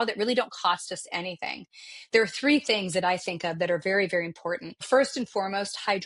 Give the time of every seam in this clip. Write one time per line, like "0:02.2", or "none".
0:04.8